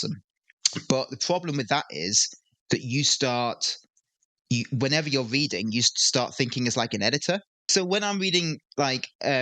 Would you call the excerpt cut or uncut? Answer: cut